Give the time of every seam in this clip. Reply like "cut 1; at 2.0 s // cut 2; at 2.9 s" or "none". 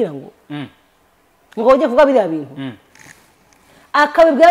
none